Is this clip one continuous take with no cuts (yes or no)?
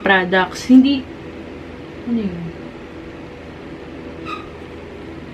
yes